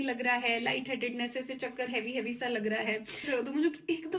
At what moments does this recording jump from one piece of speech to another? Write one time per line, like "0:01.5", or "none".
0:03.2